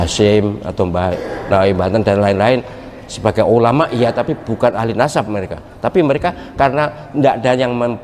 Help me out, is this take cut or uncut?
uncut